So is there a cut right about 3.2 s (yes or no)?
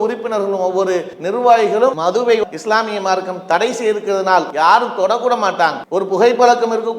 no